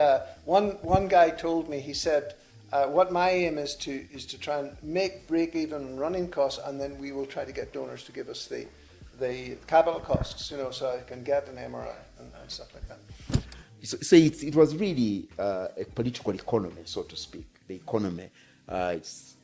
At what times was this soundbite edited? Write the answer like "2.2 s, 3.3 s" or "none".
13.6 s

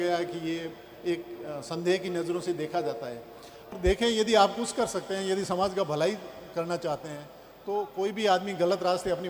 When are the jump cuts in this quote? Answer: 3.7 s

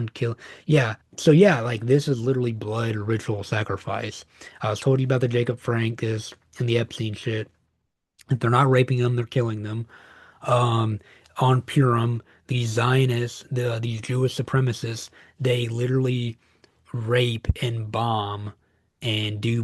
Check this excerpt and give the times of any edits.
1.0 s

